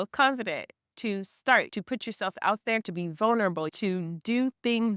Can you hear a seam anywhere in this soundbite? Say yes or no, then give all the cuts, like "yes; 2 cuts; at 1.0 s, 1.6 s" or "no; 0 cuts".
yes; 4 cuts; at 0.9 s, 1.7 s, 2.9 s, 3.7 s